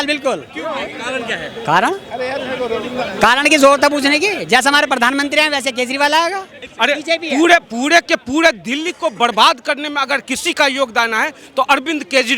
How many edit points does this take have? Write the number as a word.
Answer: one